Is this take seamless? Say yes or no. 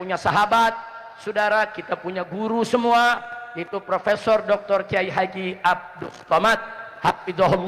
yes